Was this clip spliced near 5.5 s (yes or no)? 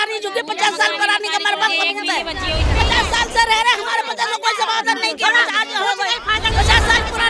no